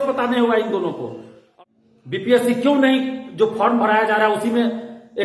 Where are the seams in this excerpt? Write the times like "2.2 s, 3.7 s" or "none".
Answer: 1.4 s